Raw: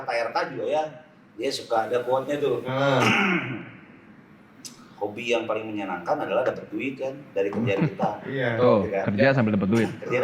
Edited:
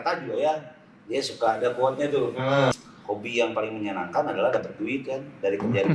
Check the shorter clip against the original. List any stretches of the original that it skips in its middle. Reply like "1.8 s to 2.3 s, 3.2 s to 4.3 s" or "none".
3.0 s to 4.6 s